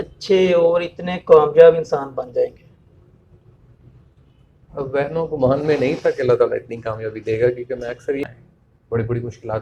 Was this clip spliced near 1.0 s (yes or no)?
no